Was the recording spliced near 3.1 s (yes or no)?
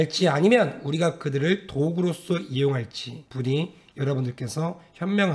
no